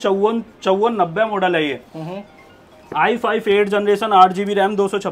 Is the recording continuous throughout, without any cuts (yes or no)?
yes